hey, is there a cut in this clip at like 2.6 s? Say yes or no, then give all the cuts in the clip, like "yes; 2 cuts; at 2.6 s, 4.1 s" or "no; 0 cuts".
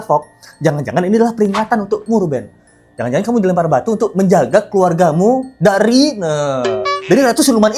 no; 0 cuts